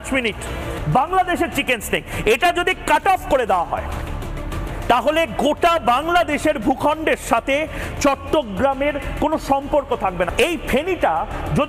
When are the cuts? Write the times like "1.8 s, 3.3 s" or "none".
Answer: none